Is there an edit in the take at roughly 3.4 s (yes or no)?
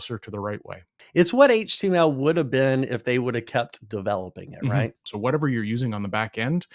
no